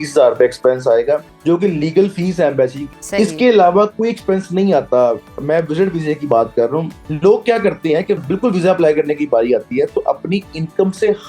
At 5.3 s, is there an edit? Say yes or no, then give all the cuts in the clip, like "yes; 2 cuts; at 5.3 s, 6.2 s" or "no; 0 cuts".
no; 4 cuts; at 1.3 s, 2.8 s, 7.0 s, 8.2 s